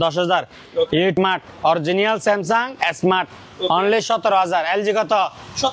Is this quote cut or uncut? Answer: cut